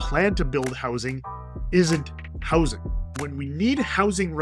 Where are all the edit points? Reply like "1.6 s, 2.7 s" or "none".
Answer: 3.1 s